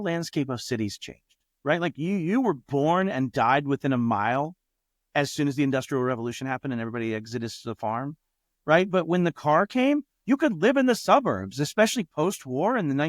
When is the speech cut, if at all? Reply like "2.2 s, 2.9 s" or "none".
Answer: none